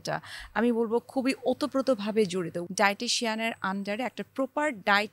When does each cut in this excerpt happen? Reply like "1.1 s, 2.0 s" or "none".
2.6 s